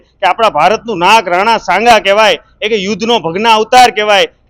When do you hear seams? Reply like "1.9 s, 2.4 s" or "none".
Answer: none